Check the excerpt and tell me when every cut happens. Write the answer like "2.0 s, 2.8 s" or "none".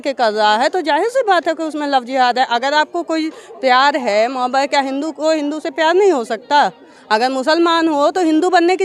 none